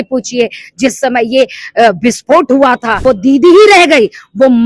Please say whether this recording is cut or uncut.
cut